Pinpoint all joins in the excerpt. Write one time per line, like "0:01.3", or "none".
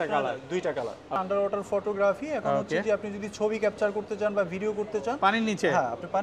0:01.2